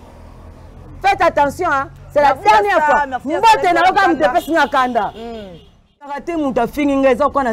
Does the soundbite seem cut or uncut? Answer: cut